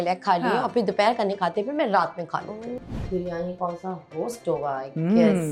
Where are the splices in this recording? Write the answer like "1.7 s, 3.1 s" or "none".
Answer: 2.8 s